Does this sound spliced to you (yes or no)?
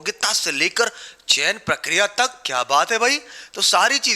no